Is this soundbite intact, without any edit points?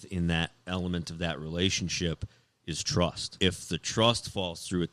no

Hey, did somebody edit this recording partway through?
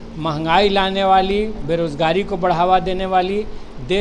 no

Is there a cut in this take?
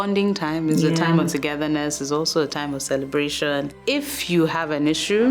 yes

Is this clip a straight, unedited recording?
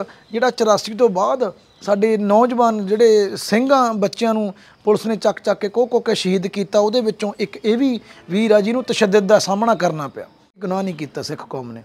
no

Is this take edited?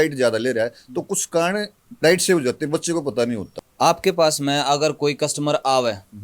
yes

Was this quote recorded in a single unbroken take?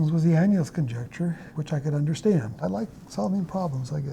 no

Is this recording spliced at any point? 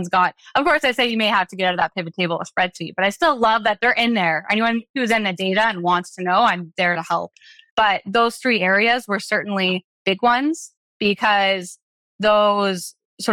no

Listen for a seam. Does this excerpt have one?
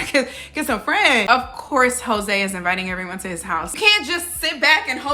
yes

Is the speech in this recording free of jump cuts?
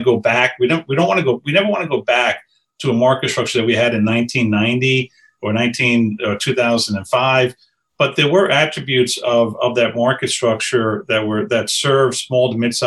yes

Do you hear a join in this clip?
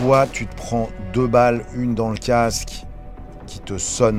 no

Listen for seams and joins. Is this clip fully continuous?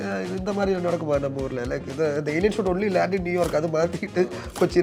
yes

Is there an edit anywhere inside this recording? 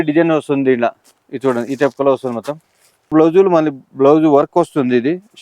yes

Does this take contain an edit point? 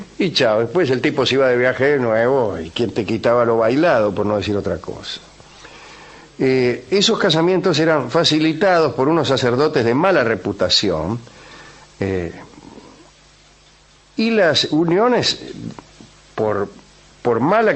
no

